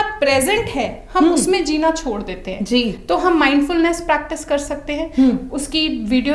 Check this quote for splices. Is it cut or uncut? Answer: uncut